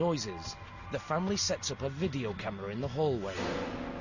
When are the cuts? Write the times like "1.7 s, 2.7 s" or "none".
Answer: 2.1 s

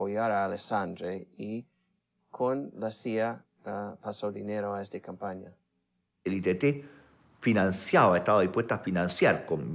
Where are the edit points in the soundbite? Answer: 2.6 s

